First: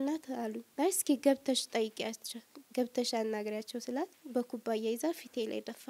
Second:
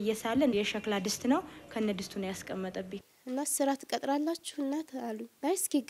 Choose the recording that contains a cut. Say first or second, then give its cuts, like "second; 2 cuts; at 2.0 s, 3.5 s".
second; 1 cut; at 3.0 s